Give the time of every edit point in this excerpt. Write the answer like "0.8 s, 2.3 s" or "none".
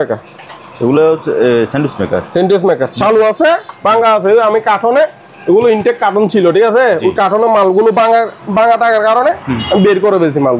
none